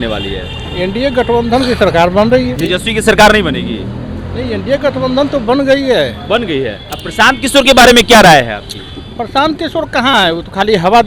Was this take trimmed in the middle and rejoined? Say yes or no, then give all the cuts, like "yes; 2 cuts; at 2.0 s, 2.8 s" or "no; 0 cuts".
yes; 2 cuts; at 2.6 s, 6.8 s